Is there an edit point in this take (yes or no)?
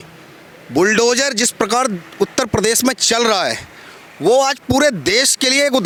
no